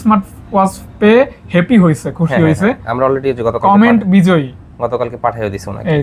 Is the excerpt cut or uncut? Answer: uncut